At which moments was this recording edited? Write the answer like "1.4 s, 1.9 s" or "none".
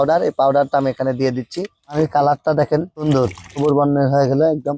1.8 s